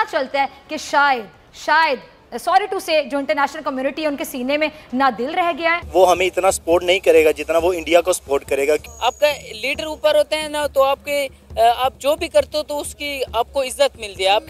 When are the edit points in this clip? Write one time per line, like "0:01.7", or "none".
0:05.8
0:08.9